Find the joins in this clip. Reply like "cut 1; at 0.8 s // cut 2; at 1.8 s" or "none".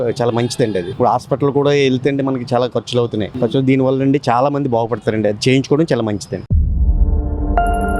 none

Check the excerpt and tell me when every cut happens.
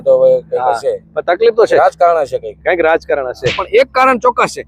cut 1; at 3.6 s

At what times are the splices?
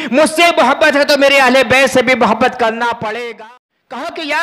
cut 1; at 3.1 s

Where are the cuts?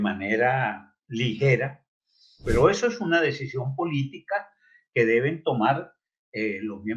cut 1; at 2.4 s

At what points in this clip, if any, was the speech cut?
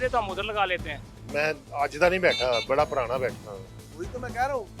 cut 1; at 1.0 s

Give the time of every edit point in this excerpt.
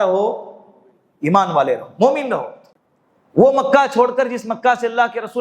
cut 1; at 2.6 s

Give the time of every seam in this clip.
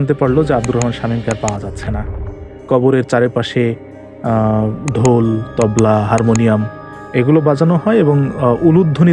cut 1; at 2.7 s

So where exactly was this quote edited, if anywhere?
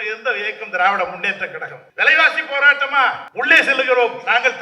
cut 1; at 1.8 s // cut 2; at 3.2 s

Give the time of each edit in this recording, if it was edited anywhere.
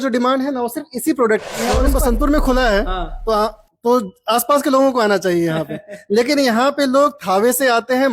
cut 1; at 1.8 s

